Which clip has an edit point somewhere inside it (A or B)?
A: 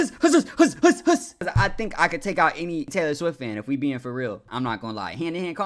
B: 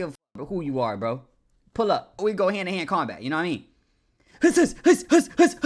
A